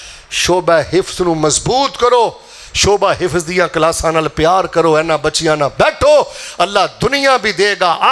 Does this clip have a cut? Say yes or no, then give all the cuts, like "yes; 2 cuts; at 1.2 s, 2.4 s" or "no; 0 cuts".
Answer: no; 0 cuts